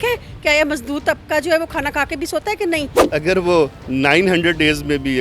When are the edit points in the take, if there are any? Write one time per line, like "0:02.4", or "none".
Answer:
0:03.0